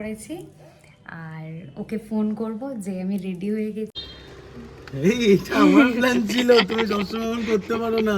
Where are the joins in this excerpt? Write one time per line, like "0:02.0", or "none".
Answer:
0:03.9